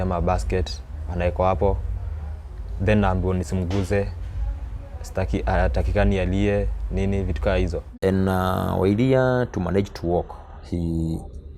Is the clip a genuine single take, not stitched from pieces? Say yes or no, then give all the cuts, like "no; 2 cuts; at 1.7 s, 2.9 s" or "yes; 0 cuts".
yes; 0 cuts